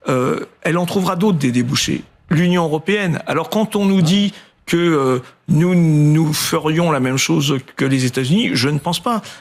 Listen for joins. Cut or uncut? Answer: uncut